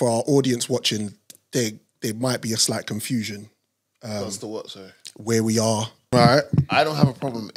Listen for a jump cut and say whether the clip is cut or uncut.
cut